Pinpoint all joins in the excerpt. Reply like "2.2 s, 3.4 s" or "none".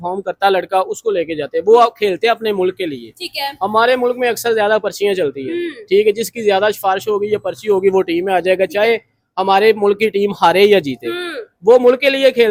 none